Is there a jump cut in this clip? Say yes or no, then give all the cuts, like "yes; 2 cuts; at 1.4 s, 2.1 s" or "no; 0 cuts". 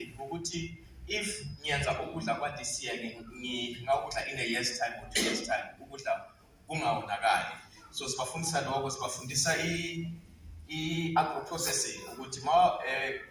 no; 0 cuts